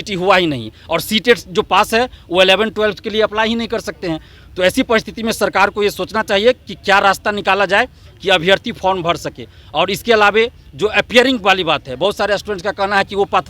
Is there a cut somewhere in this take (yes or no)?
no